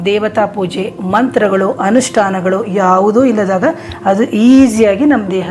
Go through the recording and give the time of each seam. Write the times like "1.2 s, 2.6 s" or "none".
none